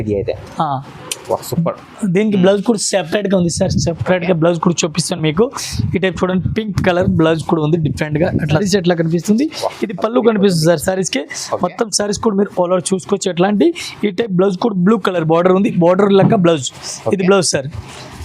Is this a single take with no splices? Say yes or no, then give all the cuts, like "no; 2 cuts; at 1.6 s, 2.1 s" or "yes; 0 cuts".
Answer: no; 1 cut; at 8.6 s